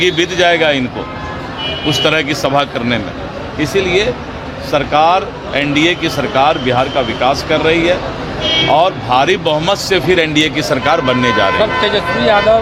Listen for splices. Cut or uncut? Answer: uncut